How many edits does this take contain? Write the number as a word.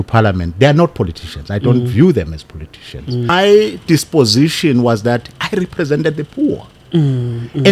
one